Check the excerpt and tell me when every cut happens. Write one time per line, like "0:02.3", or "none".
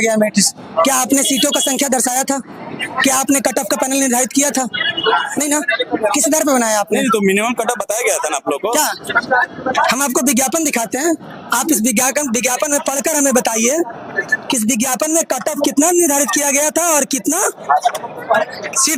none